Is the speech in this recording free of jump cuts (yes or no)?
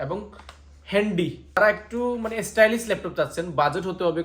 yes